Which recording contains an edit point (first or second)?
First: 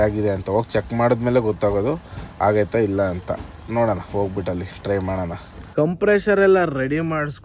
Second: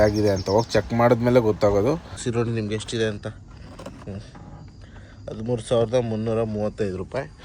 second